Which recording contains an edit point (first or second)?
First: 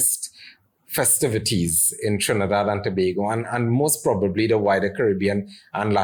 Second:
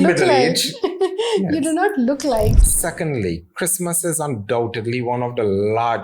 second